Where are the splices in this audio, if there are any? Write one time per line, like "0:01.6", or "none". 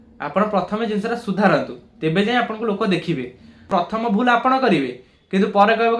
0:03.7

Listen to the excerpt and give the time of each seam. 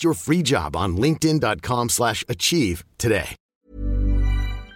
0:03.6

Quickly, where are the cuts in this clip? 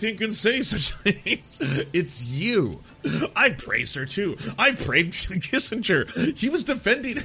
0:02.9

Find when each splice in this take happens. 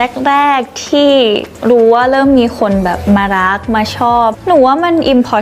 0:01.5
0:04.4

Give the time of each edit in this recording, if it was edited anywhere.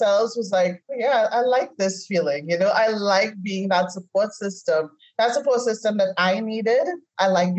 none

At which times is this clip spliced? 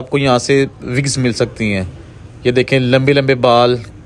none

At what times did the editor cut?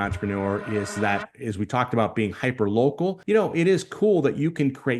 0:03.2

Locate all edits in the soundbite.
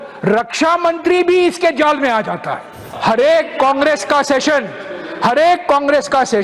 0:02.8

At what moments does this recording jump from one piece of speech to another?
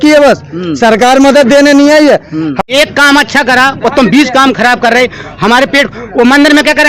0:02.6

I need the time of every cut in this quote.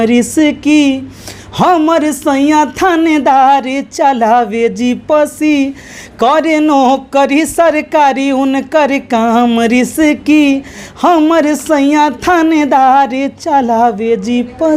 none

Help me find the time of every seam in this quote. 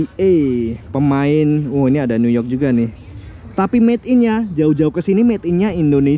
none

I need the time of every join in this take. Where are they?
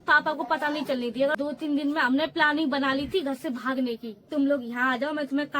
0:01.3
0:04.2

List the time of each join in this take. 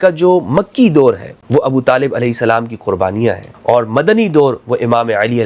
0:01.3
0:03.5

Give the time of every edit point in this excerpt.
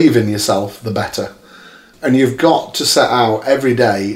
0:01.9

